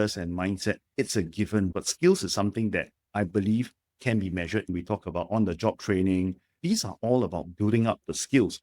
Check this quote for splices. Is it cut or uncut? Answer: cut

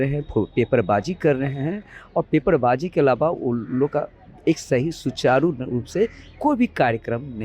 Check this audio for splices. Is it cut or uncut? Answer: uncut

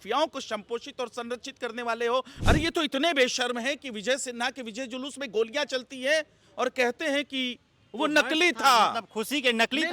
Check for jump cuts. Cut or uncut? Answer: cut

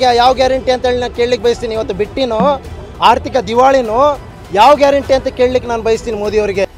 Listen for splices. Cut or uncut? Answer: uncut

